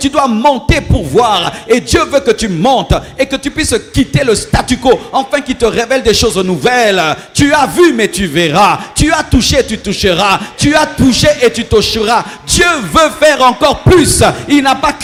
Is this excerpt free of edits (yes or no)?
yes